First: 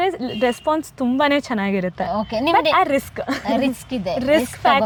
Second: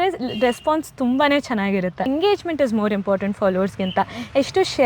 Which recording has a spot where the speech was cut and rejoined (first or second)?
second